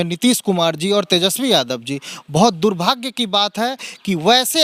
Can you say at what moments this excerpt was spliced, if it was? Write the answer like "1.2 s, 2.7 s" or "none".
none